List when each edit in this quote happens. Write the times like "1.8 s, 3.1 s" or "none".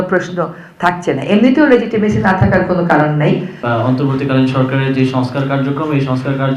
3.5 s